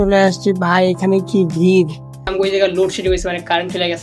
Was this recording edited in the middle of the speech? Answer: yes; 1 cut; at 2.3 s

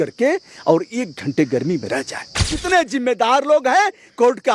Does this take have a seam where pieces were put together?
yes; 1 cut; at 2.5 s

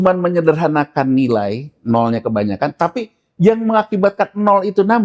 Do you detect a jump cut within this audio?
no; 0 cuts

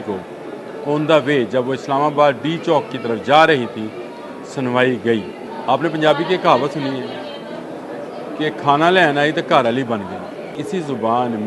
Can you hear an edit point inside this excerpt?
yes; 2 cuts; at 5.4 s, 10.5 s

